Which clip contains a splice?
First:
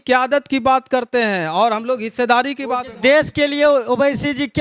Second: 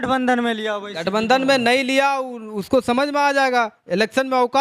first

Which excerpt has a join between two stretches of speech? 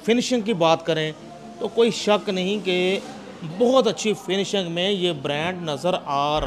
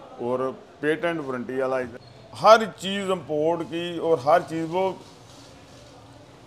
second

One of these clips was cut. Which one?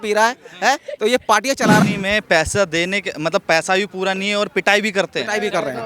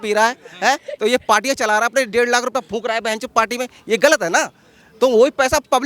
first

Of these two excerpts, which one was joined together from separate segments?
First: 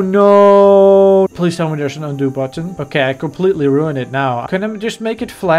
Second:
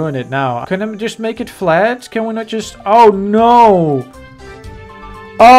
first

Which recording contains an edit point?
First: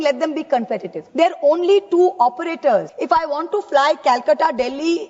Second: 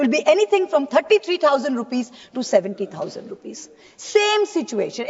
first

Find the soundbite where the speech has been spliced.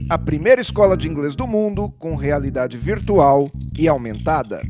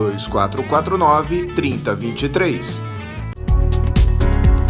second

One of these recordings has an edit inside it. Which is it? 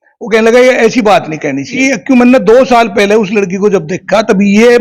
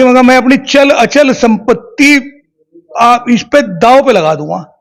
first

